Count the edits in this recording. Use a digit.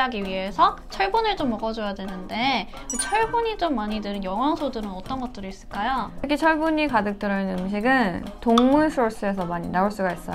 1